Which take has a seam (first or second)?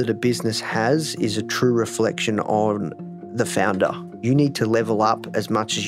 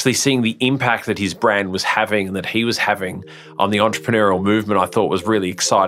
first